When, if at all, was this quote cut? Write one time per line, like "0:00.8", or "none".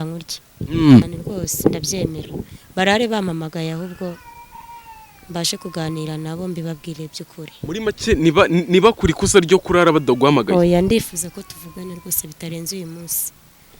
0:01.1